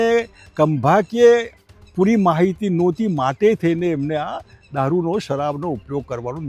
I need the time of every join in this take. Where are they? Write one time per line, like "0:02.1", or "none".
none